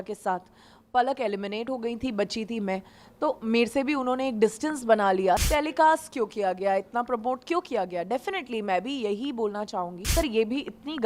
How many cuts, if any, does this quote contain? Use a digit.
2